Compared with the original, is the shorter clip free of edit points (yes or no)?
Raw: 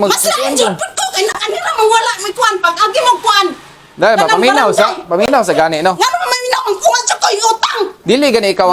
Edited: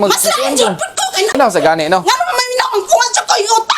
no